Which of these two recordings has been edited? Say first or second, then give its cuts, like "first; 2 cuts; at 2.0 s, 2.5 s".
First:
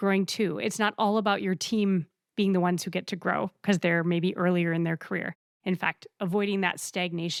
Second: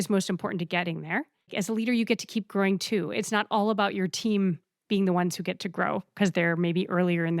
second; 1 cut; at 1.4 s